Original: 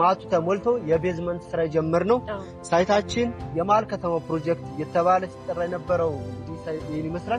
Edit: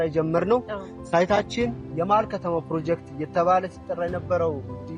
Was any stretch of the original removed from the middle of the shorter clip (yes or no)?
no